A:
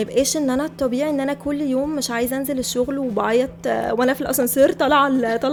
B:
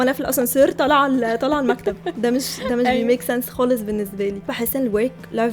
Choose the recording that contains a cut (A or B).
B